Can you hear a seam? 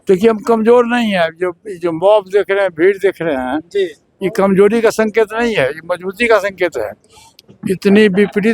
no; 0 cuts

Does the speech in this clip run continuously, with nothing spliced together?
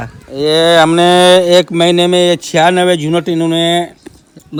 yes; 0 cuts

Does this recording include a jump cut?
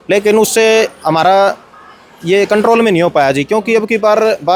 no; 0 cuts

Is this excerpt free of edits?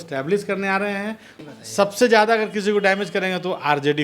no; 1 cut; at 1.3 s

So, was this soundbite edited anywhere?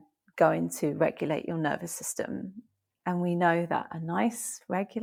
no; 0 cuts

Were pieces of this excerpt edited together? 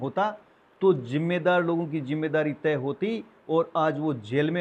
no; 0 cuts

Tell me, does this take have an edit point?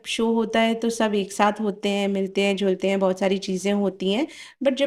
no; 0 cuts

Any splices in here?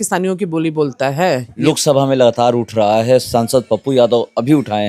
yes; 1 cut; at 1.5 s

